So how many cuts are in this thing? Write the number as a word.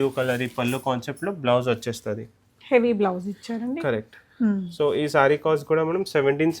zero